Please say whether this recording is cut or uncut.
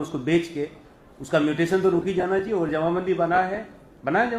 uncut